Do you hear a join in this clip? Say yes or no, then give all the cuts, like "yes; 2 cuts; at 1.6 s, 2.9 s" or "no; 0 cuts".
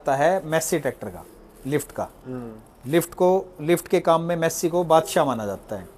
no; 0 cuts